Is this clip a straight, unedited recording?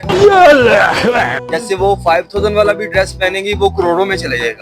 no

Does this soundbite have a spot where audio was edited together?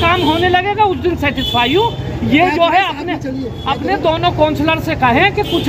no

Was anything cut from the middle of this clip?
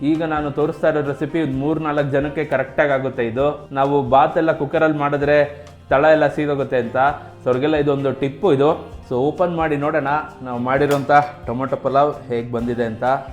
yes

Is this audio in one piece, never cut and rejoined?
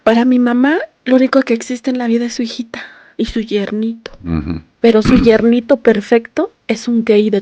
no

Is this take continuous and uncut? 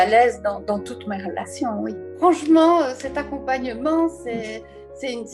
yes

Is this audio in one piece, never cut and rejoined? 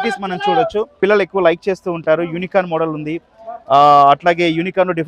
no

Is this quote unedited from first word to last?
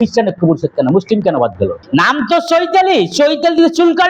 no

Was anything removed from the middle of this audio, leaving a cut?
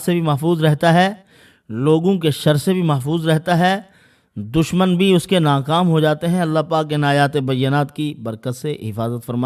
no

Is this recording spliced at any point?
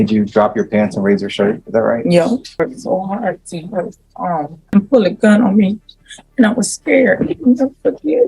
yes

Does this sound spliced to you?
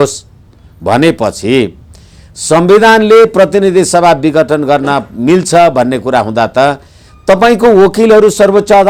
no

